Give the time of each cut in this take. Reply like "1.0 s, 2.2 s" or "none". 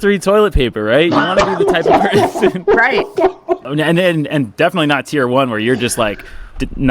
3.6 s